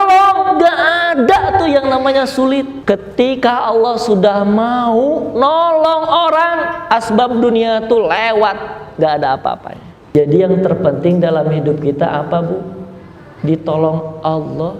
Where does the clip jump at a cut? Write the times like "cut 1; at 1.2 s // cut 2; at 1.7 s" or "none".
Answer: cut 1; at 2.8 s // cut 2; at 10.1 s